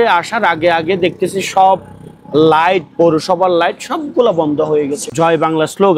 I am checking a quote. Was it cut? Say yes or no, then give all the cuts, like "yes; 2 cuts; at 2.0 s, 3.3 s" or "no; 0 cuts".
yes; 1 cut; at 5.1 s